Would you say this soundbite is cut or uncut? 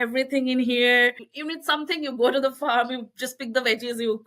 cut